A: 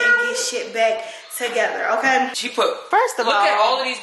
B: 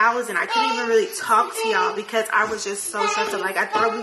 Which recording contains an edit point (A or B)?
A